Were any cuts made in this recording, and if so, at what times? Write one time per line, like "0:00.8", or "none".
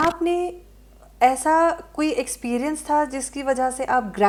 none